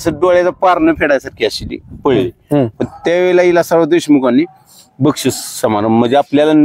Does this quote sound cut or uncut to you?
uncut